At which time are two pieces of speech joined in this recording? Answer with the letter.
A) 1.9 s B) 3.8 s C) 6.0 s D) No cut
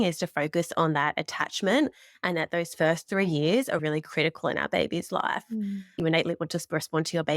C